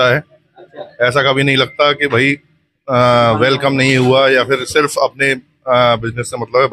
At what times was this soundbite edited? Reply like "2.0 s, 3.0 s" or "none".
none